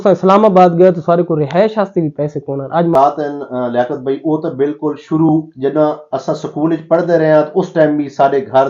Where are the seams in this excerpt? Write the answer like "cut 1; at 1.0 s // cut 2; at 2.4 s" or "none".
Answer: cut 1; at 2.9 s

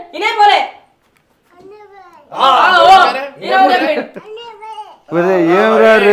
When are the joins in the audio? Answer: none

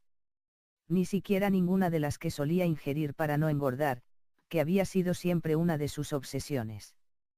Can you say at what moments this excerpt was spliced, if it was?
none

